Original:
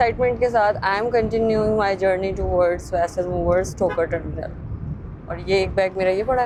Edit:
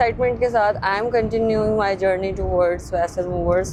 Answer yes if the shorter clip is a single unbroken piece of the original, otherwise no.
yes